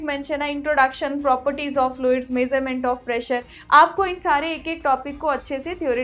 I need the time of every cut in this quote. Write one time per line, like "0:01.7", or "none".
none